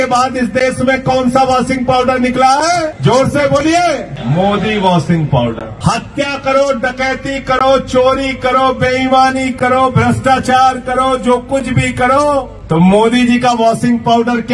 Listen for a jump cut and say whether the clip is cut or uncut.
cut